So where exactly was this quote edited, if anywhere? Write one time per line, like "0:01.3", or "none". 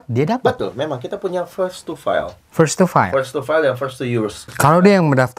0:04.5